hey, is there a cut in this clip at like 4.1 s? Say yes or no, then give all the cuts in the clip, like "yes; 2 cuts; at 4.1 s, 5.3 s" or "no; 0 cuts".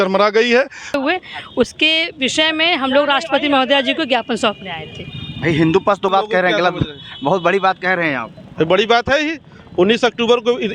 no; 2 cuts; at 1.0 s, 6.1 s